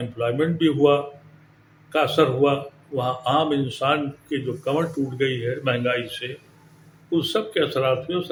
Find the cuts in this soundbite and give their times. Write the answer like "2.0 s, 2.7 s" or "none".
none